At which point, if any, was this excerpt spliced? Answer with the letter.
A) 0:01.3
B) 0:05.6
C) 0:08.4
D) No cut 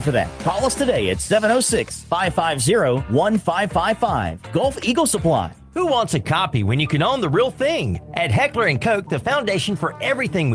B